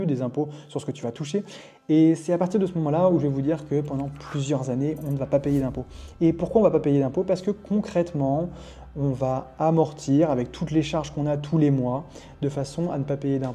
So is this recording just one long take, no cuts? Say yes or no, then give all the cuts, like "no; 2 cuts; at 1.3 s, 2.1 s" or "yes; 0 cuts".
yes; 0 cuts